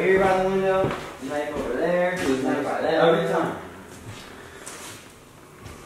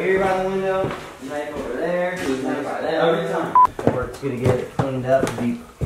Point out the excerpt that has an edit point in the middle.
second; 1 cut; at 3.7 s

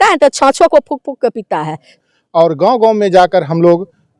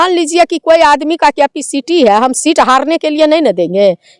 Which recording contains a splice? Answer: first; 1 cut; at 2.0 s

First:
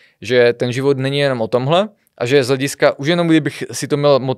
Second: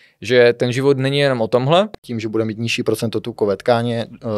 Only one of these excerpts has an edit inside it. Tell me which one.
second; 1 cut; at 2.0 s

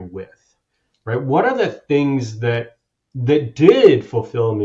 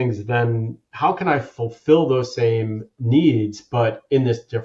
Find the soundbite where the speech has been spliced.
second; 1 cut; at 2.9 s

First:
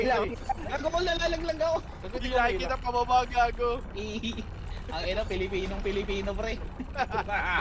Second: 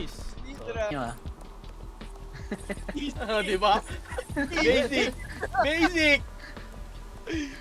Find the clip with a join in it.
second; 1 cut; at 0.9 s

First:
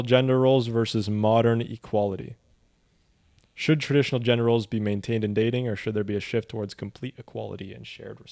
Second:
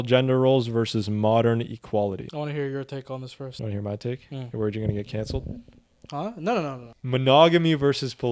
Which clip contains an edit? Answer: second; 3 cuts; at 2.3 s, 3.5 s, 6.9 s

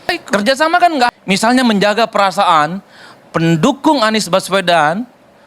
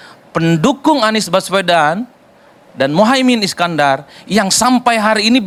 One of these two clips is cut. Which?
first; 1 cut; at 1.1 s

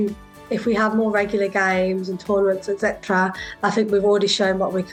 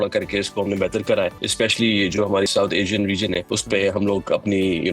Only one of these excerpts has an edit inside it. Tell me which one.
second; 3 cuts; at 1.4 s, 2.5 s, 3.5 s

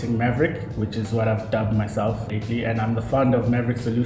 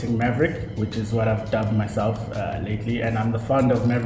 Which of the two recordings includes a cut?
first; 1 cut; at 2.3 s

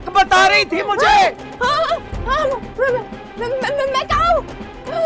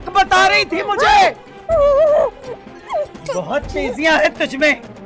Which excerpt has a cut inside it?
first; 1 cut; at 1.5 s

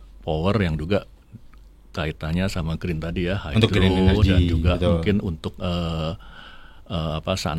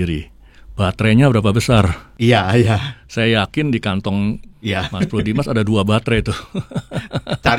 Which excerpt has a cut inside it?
second; 2 cuts; at 2.0 s, 4.5 s

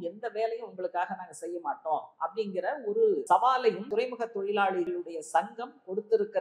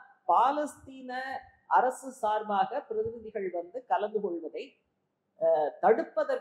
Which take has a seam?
first; 3 cuts; at 3.2 s, 3.9 s, 4.9 s

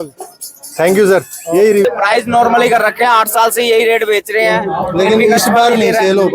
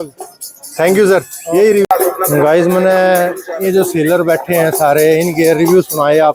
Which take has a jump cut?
first; 1 cut; at 1.9 s

